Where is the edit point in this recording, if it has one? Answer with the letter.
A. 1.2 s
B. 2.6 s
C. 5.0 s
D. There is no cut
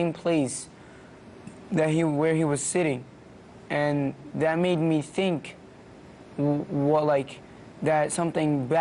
B